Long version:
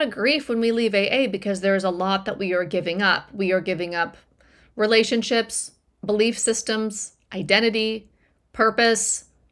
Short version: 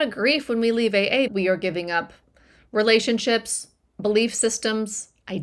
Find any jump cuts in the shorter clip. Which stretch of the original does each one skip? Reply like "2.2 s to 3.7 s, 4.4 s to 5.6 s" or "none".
1.3 s to 3.3 s

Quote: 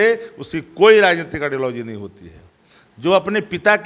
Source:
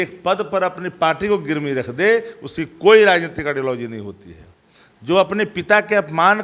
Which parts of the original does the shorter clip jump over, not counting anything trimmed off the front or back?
none

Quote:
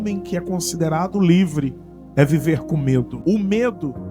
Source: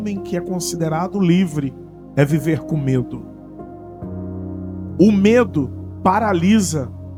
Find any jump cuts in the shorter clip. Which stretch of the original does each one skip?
3.1 s to 4.9 s

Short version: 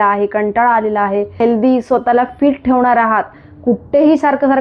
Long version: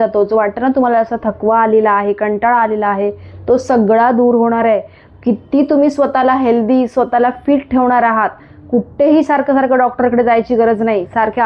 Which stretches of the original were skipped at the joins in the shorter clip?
3.2 s to 6.4 s

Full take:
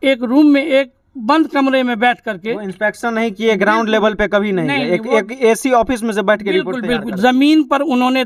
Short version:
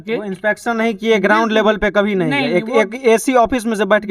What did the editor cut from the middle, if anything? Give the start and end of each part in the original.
none

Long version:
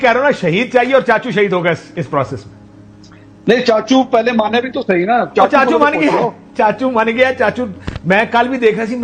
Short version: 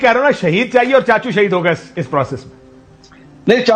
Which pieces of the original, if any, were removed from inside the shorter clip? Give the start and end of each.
none

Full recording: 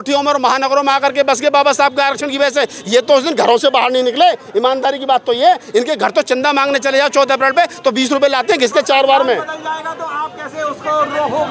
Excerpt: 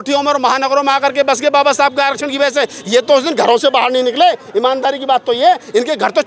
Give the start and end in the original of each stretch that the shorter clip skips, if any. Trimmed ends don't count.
none

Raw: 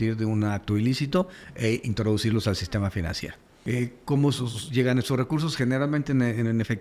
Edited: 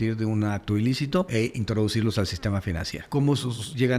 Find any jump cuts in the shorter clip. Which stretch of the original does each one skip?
1.3 s to 1.6 s, 3.3 s to 4.0 s

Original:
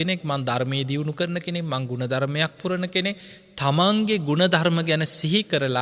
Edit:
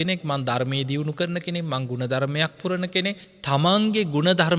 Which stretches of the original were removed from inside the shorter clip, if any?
3.3 s to 3.4 s

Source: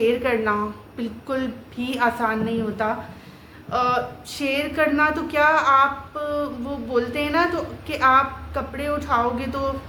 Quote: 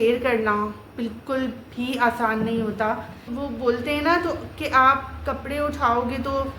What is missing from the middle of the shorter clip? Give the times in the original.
3.3 s to 6.6 s

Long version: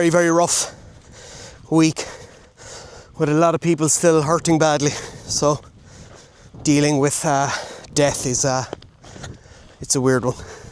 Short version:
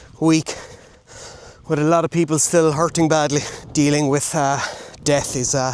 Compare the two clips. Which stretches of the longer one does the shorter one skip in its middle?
5.1 s to 6.5 s

